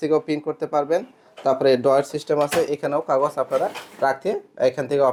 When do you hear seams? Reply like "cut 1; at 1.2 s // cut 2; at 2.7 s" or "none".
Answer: none